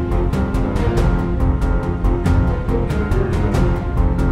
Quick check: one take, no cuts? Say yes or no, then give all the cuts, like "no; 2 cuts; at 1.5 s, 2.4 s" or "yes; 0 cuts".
yes; 0 cuts